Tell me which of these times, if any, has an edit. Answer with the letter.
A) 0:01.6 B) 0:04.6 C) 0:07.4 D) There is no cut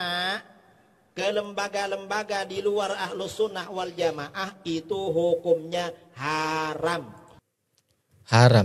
D